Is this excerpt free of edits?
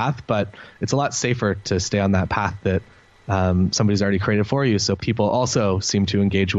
no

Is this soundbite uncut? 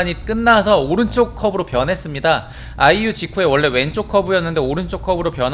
yes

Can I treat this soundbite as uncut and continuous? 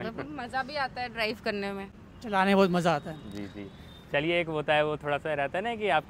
yes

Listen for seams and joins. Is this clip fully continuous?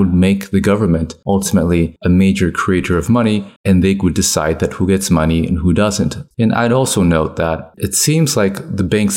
no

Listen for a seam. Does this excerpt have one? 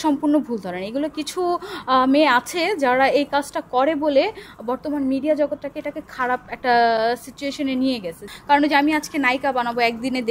yes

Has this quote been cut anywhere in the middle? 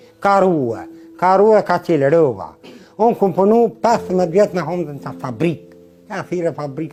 no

